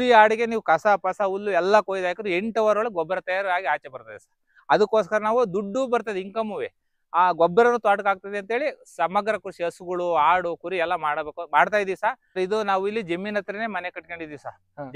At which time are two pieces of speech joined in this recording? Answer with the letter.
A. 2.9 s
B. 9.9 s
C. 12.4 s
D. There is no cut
C